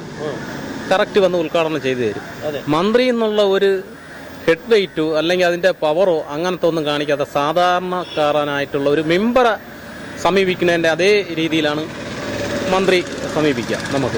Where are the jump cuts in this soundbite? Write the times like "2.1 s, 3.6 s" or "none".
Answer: none